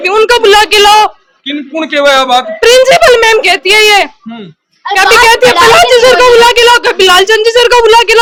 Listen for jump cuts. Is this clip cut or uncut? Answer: uncut